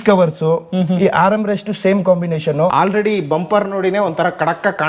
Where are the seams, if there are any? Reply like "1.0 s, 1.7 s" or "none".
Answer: 2.7 s

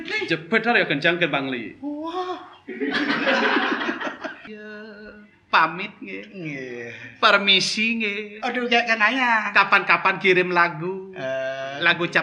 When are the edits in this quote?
4.5 s

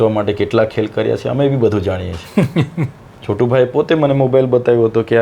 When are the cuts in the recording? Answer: 3.1 s

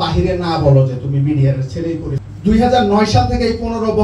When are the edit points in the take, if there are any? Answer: 2.2 s

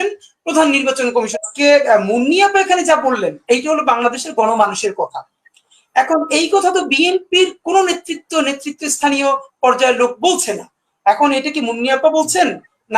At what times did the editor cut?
1.4 s

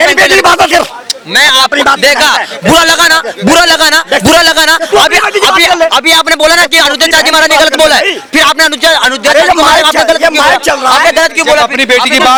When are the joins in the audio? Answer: none

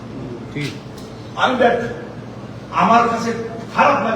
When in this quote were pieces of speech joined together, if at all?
0.9 s

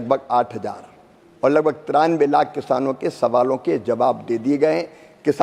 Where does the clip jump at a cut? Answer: none

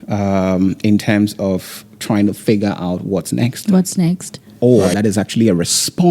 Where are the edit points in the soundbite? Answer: 4.4 s

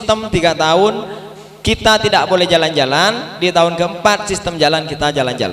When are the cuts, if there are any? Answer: none

